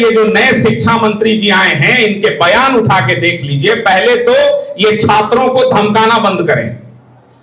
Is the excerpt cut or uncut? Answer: uncut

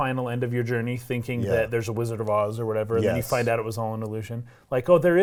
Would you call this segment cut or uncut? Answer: uncut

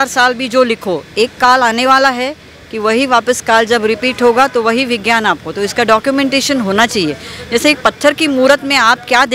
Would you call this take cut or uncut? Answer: uncut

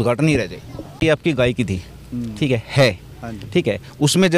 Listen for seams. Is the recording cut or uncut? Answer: cut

